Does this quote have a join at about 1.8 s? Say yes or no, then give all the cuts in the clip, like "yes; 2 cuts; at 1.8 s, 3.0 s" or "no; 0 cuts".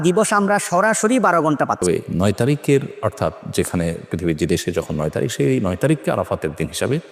yes; 1 cut; at 1.8 s